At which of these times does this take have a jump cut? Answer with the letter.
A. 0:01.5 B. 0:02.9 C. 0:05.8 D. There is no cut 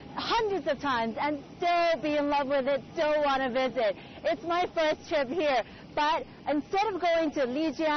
C